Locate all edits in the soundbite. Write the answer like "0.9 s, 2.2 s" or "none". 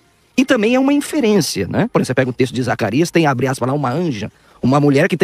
1.9 s